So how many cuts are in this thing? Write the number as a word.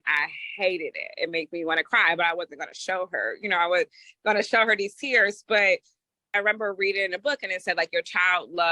one